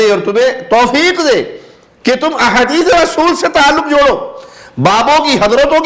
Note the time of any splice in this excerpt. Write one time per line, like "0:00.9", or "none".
none

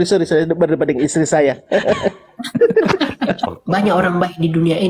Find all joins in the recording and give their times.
0:03.5

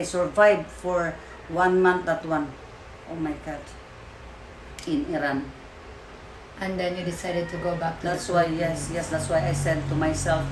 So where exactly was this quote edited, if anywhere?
none

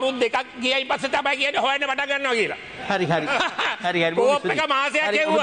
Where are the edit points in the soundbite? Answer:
none

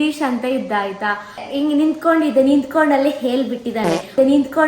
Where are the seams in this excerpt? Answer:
0:01.4

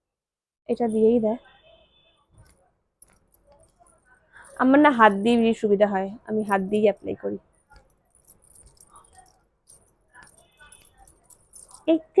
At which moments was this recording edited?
none

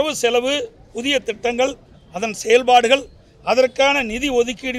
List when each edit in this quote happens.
none

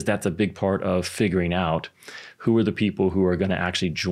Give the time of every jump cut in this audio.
none

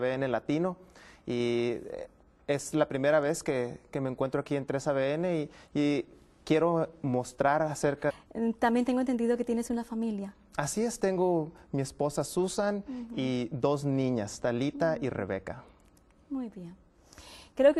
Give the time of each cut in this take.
none

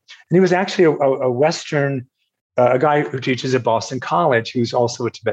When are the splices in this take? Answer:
none

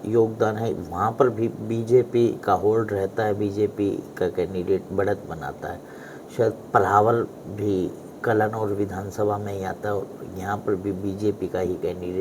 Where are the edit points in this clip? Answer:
none

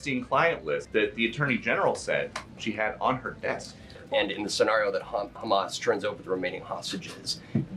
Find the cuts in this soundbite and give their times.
0:00.9
0:02.5
0:04.0

